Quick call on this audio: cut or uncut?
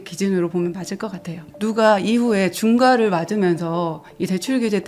cut